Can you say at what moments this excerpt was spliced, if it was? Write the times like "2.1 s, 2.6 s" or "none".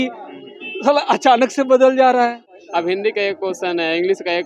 2.6 s